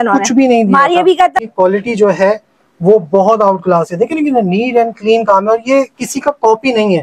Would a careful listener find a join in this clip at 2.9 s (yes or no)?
no